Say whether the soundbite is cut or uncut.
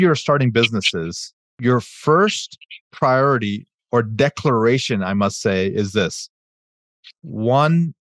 cut